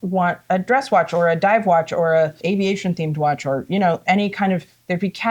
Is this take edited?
yes; 1 cut; at 2.4 s

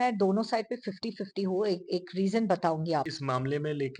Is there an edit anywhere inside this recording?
yes; 1 cut; at 3.1 s

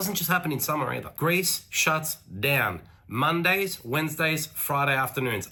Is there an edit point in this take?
no; 0 cuts

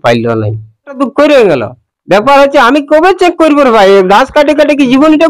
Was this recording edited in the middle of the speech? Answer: yes; 1 cut; at 1.0 s

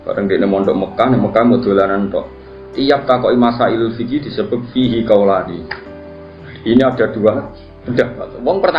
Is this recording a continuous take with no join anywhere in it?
yes; 0 cuts

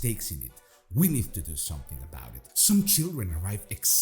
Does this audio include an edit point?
yes; 1 cut; at 2.5 s

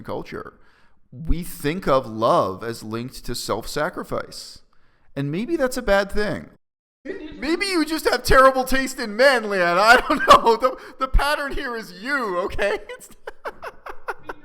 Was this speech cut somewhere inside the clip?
yes; 1 cut; at 6.5 s

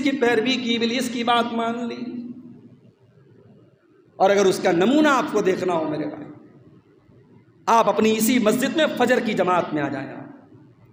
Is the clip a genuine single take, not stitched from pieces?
yes; 0 cuts

